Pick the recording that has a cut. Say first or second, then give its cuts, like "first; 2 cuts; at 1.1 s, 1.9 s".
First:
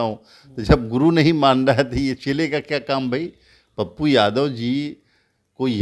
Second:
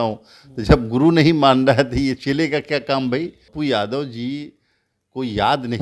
second; 1 cut; at 3.4 s